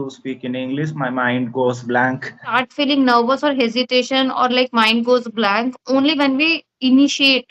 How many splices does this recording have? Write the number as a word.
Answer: one